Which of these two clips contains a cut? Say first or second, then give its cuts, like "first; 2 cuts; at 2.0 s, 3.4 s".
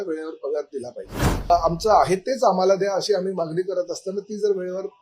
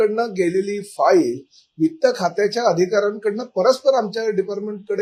first; 1 cut; at 1.5 s